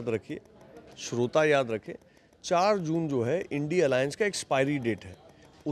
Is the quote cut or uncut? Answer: uncut